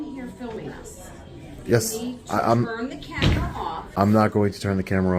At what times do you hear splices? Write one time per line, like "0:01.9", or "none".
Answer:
0:04.0